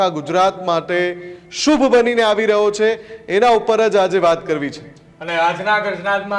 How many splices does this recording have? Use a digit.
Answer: 0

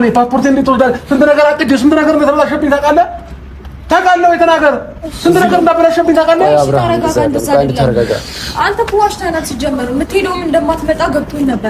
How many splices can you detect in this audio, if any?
0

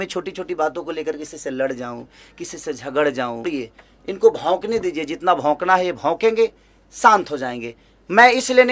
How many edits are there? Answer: 1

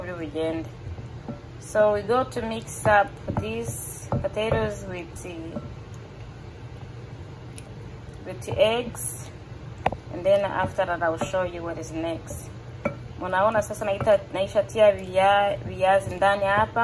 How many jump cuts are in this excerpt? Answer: 0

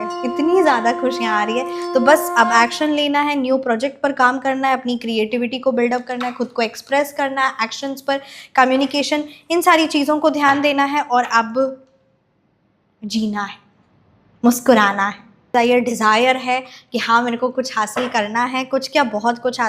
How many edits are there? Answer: 1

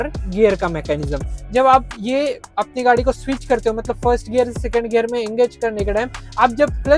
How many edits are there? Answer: 1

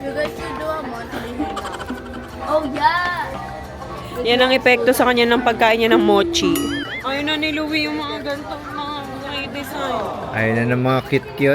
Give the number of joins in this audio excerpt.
2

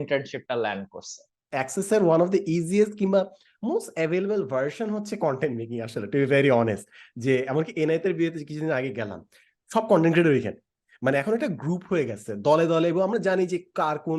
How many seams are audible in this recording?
1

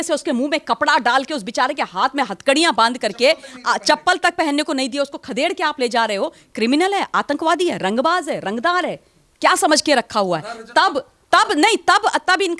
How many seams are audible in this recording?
0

